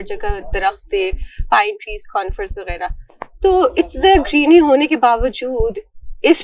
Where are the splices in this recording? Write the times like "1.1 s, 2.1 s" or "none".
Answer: none